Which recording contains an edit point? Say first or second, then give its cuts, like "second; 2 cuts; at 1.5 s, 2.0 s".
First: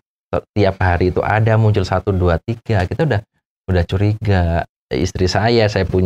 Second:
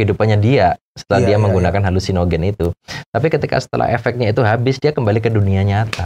first; 1 cut; at 4.8 s